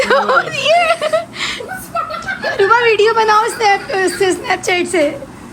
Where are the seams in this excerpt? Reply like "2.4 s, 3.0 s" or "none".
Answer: none